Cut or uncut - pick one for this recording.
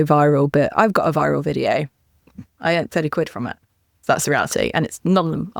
uncut